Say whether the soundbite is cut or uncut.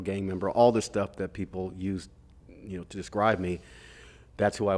uncut